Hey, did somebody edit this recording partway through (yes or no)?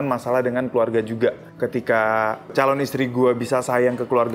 yes